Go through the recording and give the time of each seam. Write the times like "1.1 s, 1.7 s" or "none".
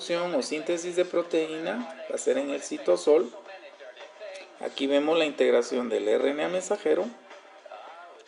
3.5 s